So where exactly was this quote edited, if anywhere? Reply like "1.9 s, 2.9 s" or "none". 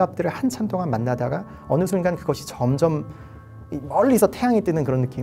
none